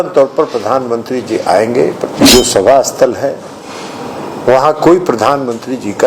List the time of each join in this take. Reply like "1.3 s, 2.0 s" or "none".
2.2 s